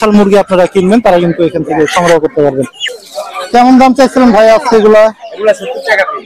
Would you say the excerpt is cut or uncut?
cut